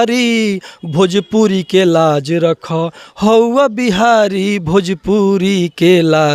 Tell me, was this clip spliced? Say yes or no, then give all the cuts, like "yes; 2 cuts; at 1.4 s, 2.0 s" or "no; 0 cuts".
no; 0 cuts